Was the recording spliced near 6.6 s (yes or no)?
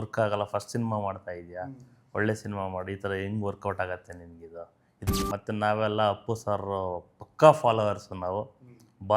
no